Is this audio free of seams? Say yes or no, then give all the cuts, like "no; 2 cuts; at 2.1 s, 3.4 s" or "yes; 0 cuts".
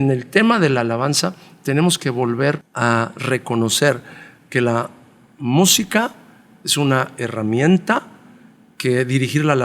no; 1 cut; at 2.7 s